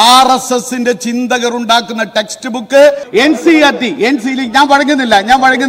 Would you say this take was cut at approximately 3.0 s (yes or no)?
yes